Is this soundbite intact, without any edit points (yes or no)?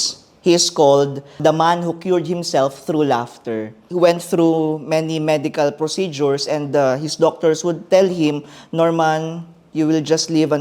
no